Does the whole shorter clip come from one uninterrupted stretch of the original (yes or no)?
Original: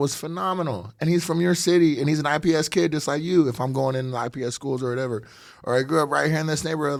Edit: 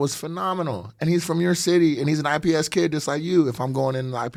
yes